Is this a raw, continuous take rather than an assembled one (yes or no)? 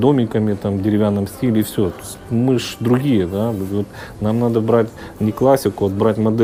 yes